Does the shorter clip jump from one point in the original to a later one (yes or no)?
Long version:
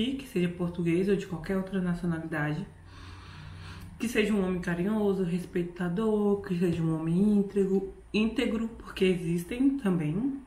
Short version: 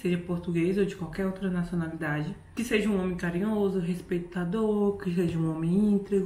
yes